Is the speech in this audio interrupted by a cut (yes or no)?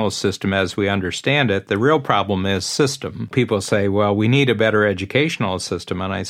yes